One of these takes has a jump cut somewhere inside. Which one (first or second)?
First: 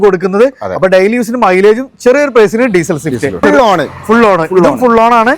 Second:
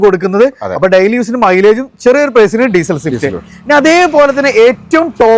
first